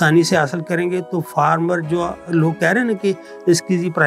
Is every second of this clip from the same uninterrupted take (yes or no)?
yes